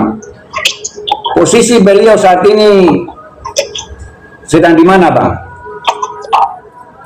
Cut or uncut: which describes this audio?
cut